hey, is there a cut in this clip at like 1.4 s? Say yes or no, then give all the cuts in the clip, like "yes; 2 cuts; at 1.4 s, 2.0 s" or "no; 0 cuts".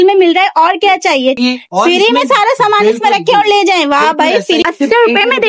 yes; 2 cuts; at 1.4 s, 4.6 s